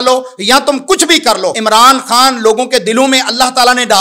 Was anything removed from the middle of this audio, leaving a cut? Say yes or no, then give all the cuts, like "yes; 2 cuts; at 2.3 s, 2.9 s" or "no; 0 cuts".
yes; 1 cut; at 1.6 s